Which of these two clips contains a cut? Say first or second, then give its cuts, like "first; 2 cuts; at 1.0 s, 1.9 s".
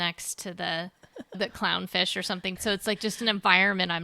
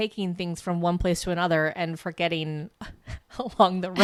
first; 2 cuts; at 1.2 s, 2.6 s